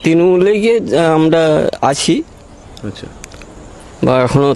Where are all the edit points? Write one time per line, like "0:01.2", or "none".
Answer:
none